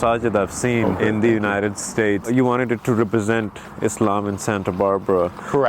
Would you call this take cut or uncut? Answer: cut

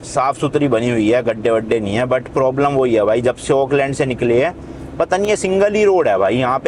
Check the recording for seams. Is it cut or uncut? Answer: uncut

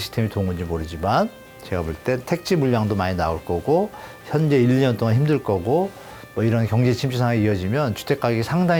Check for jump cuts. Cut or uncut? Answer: uncut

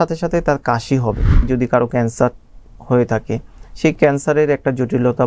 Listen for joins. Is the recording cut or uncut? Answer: cut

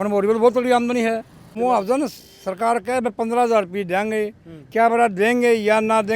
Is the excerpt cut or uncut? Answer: cut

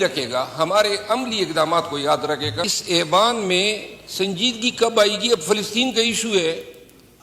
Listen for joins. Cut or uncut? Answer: cut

